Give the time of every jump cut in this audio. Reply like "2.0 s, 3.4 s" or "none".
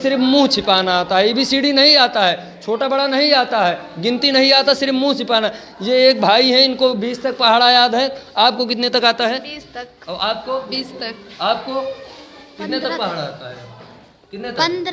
none